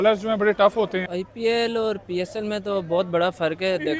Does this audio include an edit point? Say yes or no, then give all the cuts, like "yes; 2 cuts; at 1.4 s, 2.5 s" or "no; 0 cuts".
yes; 1 cut; at 1.2 s